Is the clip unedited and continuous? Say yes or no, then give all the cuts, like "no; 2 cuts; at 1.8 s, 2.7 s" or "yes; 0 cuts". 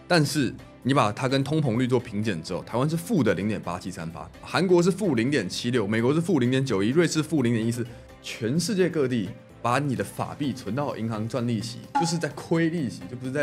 no; 1 cut; at 4.4 s